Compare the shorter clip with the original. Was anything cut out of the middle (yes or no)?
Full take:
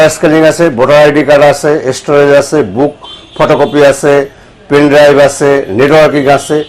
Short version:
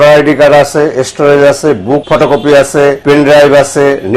yes